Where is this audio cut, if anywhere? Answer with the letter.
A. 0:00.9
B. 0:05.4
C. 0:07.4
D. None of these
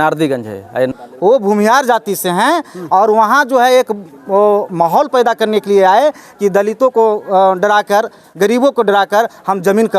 A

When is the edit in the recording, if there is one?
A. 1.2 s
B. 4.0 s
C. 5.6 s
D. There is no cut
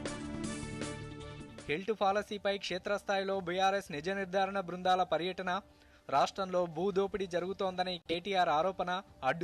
A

